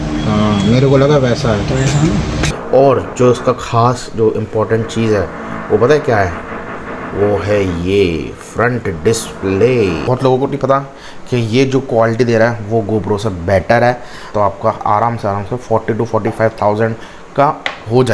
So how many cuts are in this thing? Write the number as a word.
three